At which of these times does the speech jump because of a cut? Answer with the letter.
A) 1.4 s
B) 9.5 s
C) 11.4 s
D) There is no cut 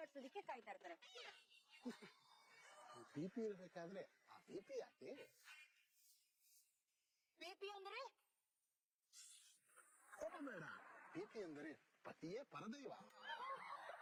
D